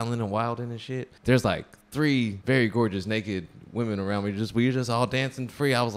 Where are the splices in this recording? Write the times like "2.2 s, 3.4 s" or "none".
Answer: 1.1 s, 2.4 s